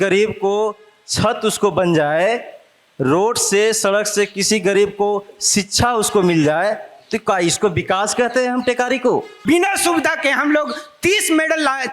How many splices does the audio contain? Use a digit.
1